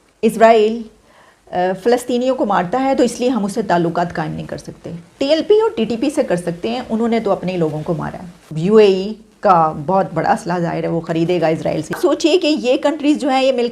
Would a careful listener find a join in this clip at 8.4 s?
yes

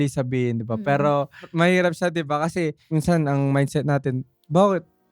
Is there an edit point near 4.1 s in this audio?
no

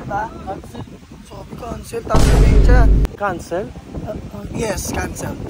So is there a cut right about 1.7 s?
no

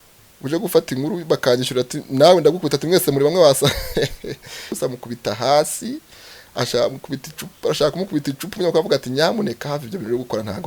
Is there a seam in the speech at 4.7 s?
yes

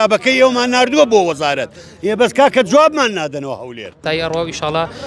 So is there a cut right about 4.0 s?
yes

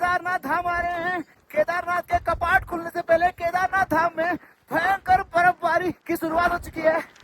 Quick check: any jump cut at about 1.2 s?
no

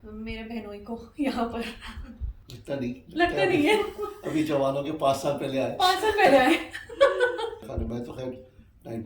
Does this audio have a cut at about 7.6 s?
yes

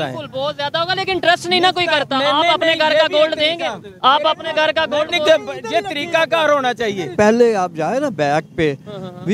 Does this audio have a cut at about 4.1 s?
no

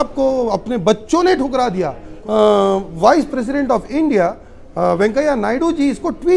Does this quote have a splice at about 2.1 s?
yes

